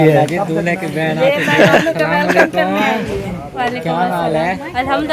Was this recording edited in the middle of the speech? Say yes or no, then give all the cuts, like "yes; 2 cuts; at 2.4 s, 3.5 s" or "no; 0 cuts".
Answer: no; 0 cuts